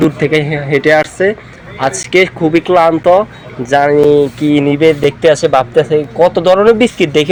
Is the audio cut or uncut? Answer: uncut